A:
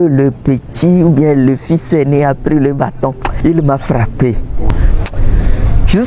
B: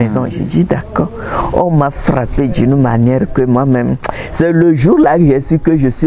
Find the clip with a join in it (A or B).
A